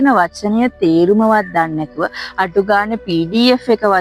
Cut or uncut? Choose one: uncut